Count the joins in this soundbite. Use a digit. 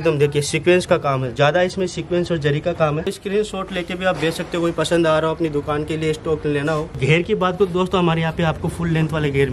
2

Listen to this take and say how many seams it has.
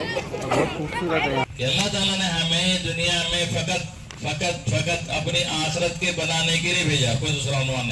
1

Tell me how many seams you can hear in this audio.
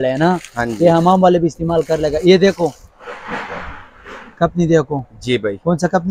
0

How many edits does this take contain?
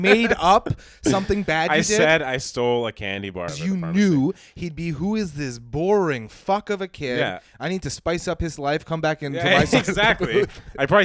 1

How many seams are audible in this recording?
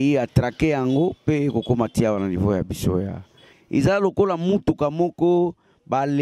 1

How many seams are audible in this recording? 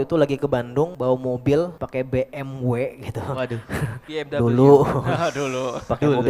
3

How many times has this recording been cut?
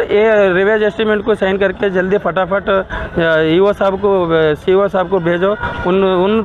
0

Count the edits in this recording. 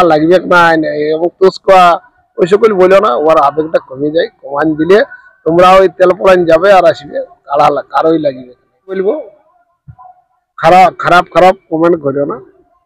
1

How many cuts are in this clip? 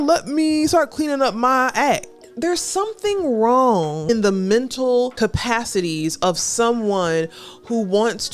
3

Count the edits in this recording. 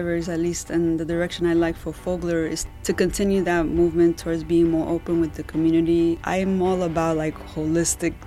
2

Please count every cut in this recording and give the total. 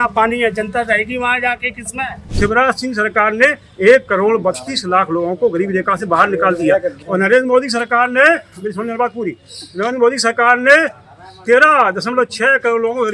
1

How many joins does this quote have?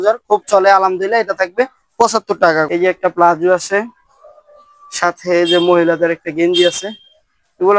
1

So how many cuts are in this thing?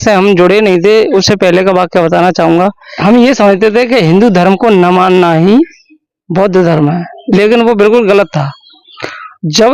1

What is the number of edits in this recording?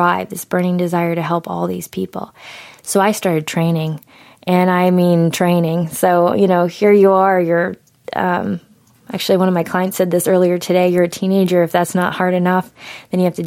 0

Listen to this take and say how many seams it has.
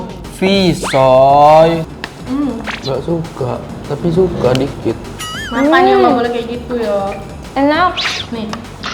1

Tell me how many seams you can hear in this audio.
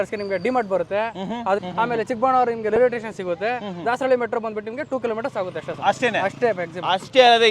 1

